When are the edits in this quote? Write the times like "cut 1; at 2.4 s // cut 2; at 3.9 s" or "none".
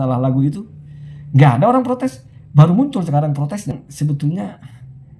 cut 1; at 3.7 s

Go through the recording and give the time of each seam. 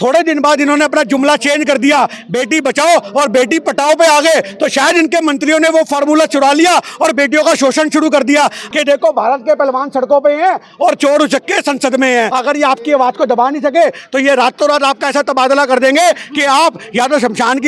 cut 1; at 8.6 s // cut 2; at 12.3 s

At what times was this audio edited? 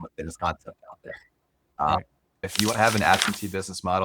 cut 1; at 2.4 s

